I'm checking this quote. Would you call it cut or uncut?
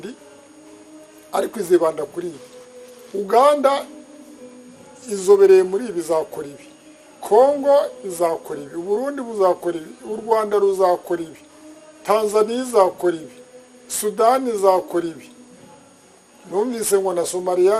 uncut